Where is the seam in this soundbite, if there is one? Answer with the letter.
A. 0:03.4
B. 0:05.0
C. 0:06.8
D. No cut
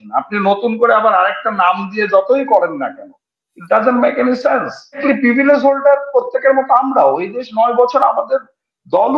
B